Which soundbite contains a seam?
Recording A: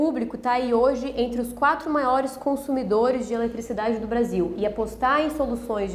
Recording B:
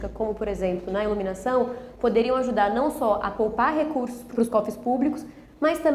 B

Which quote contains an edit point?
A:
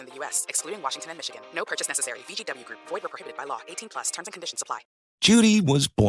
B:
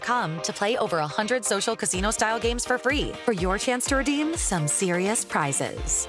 A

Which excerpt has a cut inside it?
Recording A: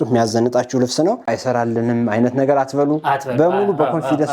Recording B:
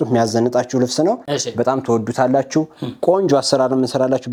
A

